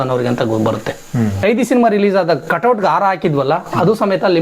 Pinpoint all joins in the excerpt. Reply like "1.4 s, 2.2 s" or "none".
1.4 s